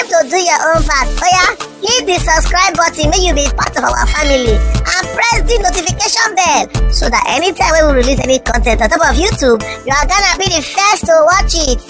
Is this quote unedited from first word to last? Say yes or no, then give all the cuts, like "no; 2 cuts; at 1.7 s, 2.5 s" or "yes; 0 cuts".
yes; 0 cuts